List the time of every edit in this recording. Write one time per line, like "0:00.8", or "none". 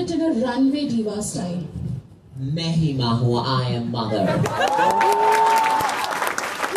none

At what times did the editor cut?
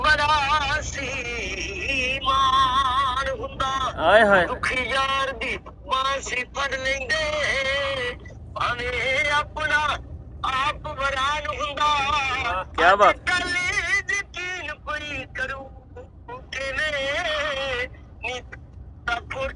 none

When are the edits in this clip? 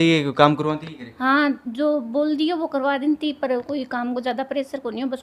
none

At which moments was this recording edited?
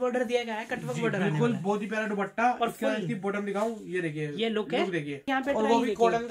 0:05.3

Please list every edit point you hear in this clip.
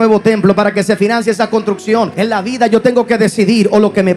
0:02.1

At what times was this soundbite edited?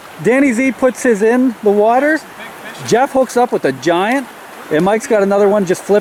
none

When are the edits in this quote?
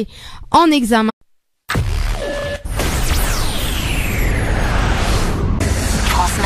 none

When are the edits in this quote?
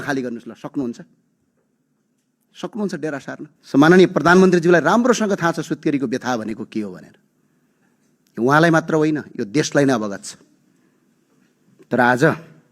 0:03.5

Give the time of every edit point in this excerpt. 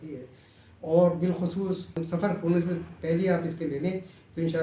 0:01.9

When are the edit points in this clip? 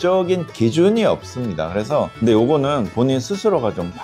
0:02.1

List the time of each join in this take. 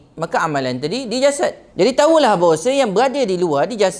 0:01.6

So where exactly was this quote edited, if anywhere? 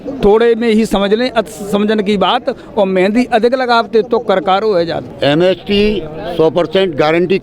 none

